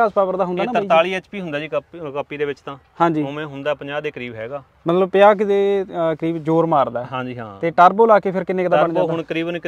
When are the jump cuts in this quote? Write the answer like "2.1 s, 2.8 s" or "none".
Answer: none